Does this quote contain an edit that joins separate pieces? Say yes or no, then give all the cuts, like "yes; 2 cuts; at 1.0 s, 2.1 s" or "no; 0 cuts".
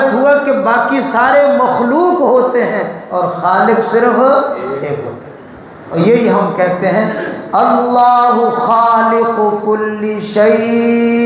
yes; 1 cut; at 6.0 s